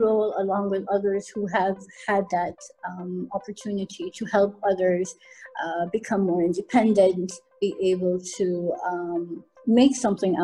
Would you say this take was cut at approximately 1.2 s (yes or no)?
no